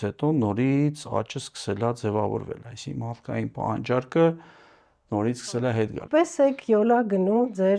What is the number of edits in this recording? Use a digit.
1